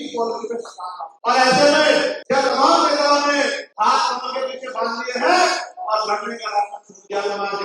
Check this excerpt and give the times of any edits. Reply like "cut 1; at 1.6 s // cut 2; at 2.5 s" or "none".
cut 1; at 1.0 s // cut 2; at 2.2 s // cut 3; at 3.6 s